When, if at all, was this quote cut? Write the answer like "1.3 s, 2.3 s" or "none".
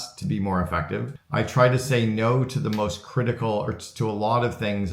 1.2 s